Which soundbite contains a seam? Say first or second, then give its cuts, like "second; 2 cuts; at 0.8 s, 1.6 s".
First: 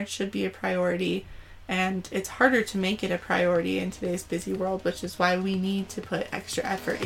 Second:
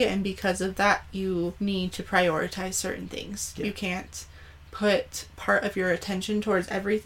second; 1 cut; at 1.5 s